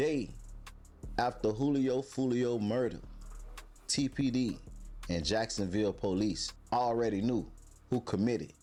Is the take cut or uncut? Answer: uncut